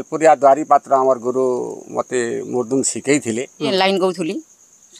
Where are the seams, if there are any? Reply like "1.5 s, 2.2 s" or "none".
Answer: 3.7 s